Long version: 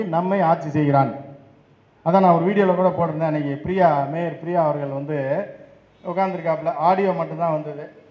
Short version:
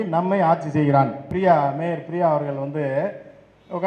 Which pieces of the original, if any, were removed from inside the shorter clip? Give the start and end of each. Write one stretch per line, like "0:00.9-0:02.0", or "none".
0:01.3-0:03.6